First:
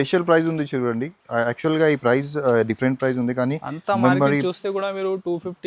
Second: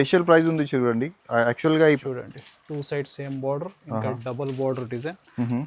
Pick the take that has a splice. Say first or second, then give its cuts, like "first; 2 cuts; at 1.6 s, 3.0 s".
second; 1 cut; at 2.0 s